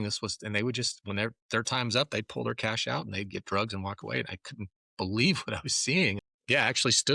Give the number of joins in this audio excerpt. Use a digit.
1